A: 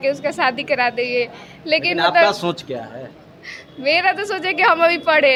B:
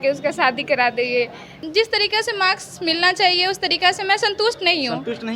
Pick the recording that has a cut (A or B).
B